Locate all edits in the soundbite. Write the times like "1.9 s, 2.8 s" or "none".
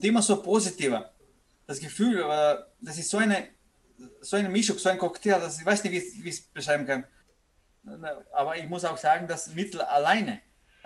7.2 s

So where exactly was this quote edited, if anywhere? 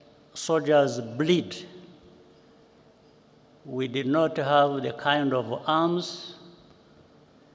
2.8 s

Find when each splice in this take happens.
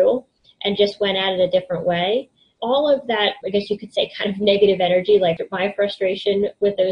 2.5 s, 3.4 s, 5.4 s

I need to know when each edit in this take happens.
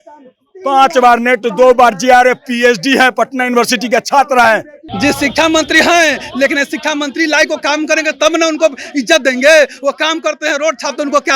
4.8 s

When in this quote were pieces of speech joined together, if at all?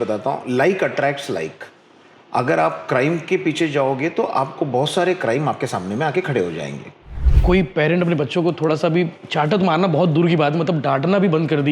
7.3 s

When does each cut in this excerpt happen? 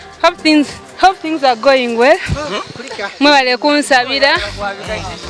none

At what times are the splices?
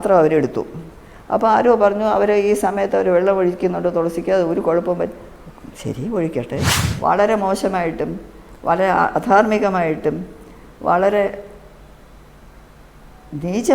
6.9 s

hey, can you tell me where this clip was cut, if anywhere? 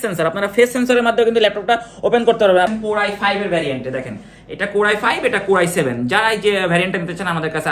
2.7 s

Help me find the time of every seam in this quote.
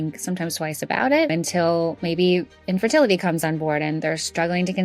1.3 s

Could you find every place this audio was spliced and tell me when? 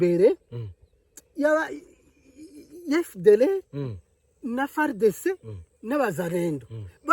none

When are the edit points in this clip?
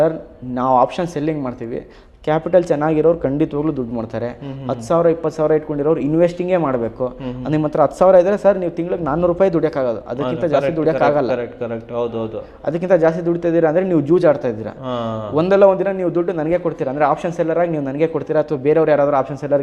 none

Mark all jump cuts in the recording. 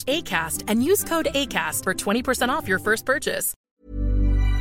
3.5 s

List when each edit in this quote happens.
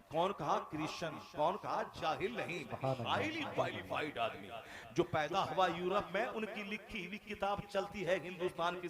none

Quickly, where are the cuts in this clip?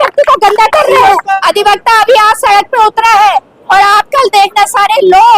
1.3 s

